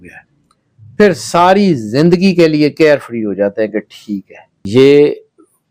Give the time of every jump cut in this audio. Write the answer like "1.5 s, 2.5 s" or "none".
4.6 s